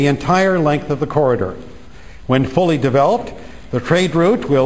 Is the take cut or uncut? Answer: cut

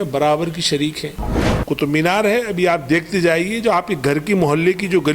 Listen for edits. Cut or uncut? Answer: cut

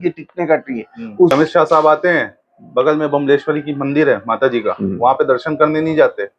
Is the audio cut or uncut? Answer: cut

